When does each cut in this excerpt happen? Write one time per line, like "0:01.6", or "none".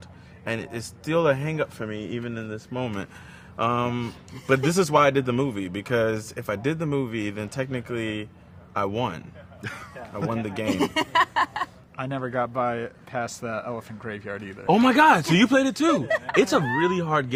none